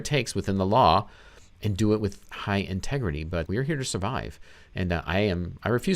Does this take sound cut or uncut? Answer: cut